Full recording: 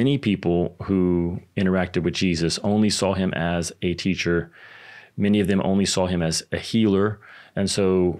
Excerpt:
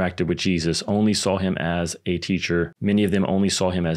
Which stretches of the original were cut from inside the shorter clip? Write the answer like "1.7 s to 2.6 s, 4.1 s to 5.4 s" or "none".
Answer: 4.5 s to 5.1 s